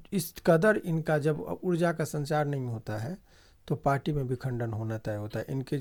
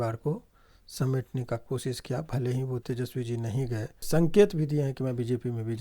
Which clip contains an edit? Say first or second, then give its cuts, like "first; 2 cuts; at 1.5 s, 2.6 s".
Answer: second; 2 cuts; at 2.8 s, 4.0 s